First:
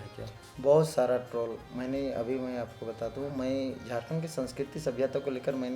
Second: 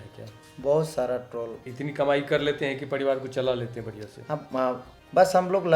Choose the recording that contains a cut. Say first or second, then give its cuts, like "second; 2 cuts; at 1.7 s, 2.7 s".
second; 2 cuts; at 1.7 s, 4.9 s